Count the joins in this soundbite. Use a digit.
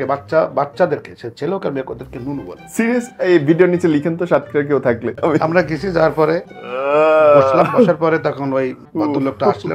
3